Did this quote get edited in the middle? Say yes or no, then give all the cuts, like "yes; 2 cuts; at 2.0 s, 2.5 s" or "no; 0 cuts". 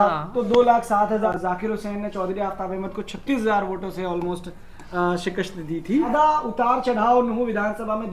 yes; 2 cuts; at 1.3 s, 6.1 s